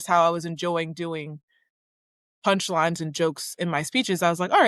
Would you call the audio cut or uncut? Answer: uncut